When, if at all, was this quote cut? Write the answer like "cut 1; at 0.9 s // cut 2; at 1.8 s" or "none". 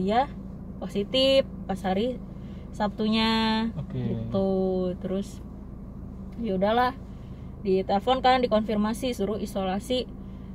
none